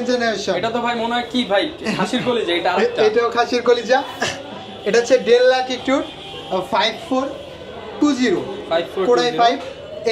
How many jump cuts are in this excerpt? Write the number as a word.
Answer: zero